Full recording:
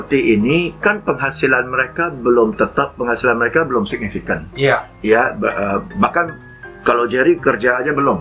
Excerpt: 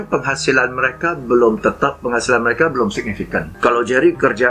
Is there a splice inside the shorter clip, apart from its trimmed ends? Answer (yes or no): yes